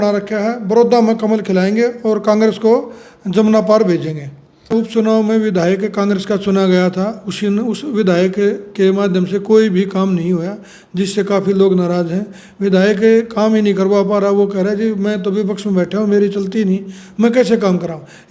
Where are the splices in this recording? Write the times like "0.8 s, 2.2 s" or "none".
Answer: 4.7 s